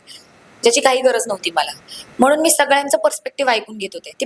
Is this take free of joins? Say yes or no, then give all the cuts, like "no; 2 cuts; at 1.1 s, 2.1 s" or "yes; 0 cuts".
yes; 0 cuts